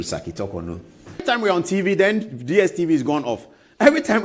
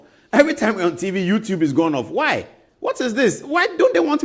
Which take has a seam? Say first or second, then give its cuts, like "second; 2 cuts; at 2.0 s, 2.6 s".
first; 1 cut; at 1.2 s